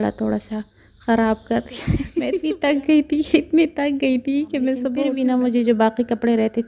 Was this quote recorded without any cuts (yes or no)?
no